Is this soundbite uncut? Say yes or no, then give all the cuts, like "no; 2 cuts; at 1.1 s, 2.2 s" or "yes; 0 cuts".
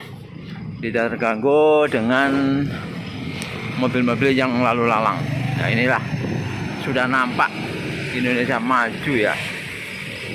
yes; 0 cuts